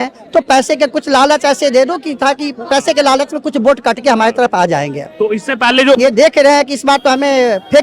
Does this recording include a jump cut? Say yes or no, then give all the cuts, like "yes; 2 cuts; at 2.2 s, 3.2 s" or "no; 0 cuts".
yes; 1 cut; at 6.0 s